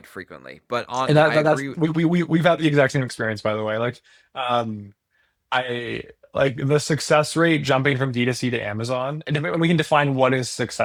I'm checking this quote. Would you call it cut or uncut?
uncut